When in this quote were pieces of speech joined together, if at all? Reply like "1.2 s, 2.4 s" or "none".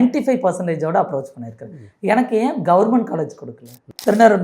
3.4 s